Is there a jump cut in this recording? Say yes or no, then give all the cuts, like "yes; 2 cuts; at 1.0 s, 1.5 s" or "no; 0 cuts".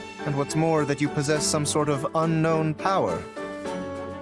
yes; 1 cut; at 3.1 s